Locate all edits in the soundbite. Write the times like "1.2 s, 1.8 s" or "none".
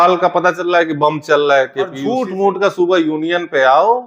2.0 s